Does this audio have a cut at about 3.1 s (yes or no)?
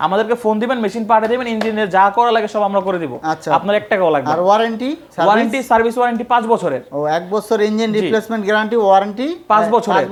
no